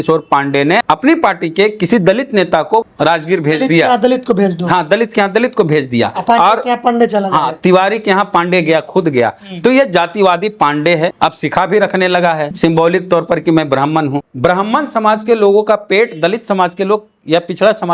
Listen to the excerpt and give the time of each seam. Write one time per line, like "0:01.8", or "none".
0:00.8
0:02.9
0:11.1
0:12.5
0:14.2